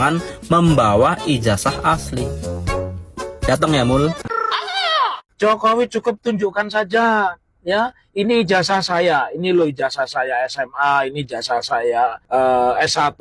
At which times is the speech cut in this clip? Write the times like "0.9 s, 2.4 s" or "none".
5.2 s, 12.2 s